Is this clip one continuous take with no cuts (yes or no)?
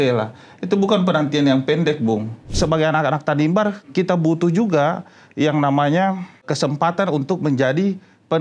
no